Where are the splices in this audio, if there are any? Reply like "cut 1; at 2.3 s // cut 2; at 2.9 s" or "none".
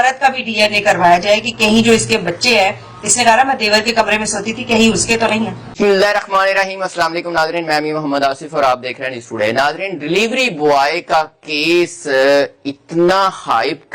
cut 1; at 5.7 s

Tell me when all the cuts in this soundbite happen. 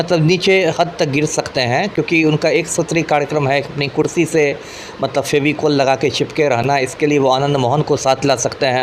none

